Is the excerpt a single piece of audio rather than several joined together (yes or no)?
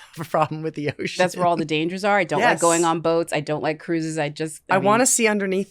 no